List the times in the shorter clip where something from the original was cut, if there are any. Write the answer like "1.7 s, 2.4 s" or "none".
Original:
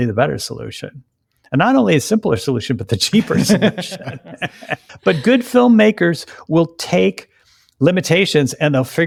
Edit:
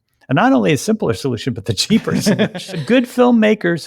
2.8 s